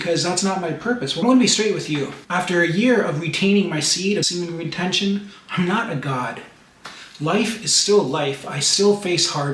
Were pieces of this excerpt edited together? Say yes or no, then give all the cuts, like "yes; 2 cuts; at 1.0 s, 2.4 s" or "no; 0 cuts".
yes; 1 cut; at 1.2 s